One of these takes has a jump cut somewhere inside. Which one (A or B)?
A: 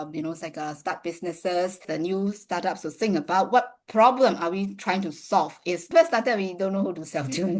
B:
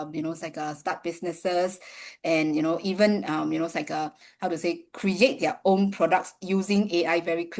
A